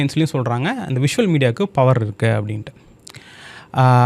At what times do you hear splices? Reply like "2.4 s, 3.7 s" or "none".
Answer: none